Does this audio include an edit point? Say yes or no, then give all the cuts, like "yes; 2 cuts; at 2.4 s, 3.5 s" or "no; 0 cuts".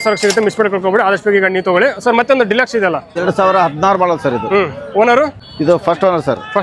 yes; 2 cuts; at 3.1 s, 5.4 s